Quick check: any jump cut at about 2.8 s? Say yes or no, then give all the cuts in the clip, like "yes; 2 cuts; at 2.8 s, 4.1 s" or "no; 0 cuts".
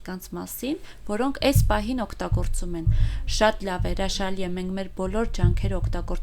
no; 0 cuts